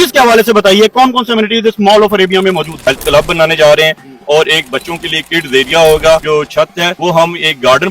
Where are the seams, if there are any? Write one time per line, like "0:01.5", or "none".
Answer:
0:02.7
0:06.6